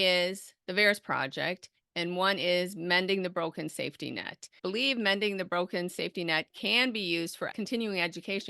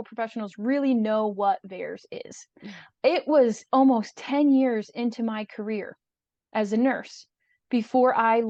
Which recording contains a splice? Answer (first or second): first